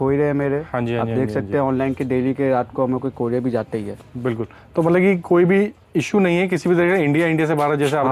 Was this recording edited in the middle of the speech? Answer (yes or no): no